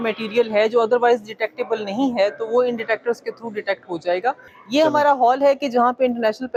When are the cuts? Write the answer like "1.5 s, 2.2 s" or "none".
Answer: none